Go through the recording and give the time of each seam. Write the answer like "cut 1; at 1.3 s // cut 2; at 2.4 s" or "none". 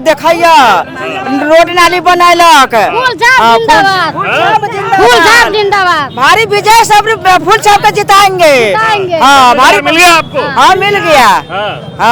none